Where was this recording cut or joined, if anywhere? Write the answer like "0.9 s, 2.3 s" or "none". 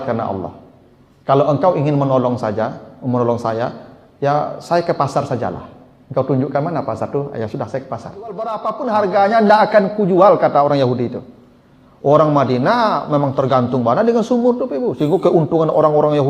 8.7 s